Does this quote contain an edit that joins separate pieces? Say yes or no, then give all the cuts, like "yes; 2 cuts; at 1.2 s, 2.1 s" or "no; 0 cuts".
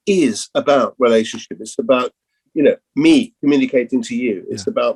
no; 0 cuts